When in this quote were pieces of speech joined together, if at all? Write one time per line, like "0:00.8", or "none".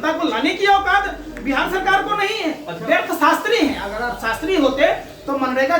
0:02.7